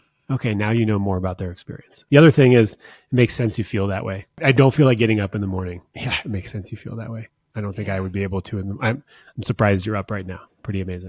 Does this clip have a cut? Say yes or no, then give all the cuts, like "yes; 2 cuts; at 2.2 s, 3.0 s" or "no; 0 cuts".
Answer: yes; 2 cuts; at 1.9 s, 4.4 s